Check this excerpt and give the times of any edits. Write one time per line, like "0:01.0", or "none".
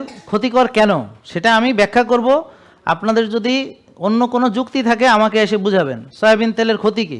none